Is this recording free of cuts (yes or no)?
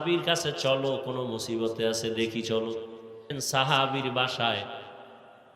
no